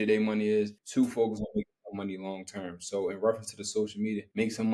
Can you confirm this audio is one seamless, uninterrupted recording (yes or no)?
yes